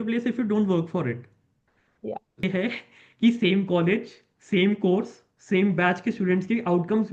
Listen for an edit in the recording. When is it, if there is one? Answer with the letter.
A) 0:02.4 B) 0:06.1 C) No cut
A